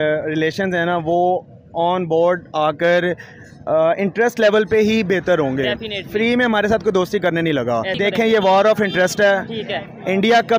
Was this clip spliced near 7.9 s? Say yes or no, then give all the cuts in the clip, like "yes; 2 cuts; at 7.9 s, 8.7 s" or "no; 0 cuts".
yes; 1 cut; at 7.9 s